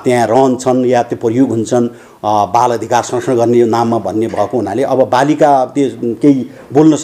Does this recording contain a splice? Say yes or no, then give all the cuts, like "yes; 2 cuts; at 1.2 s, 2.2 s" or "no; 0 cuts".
no; 0 cuts